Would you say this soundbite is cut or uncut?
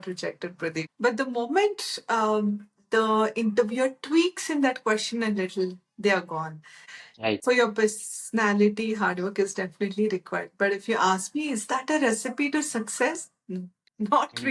cut